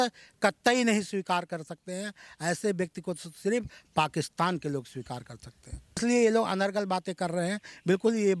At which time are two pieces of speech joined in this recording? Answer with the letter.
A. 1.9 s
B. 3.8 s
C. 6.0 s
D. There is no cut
C